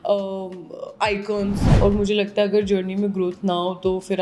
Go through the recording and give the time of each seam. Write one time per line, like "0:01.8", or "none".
0:01.7